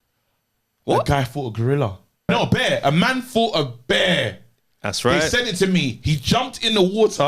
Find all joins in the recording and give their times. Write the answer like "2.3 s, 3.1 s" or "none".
2.3 s